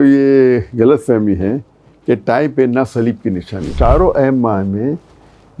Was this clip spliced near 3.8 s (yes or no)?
yes